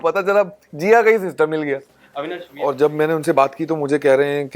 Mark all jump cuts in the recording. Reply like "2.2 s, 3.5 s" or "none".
2.4 s